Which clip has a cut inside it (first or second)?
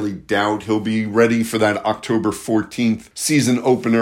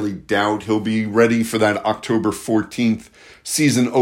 first